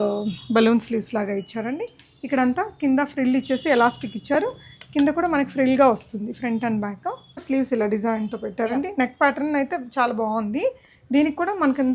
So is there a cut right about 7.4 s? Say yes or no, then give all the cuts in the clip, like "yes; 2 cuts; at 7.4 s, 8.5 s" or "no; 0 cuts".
yes; 1 cut; at 7.4 s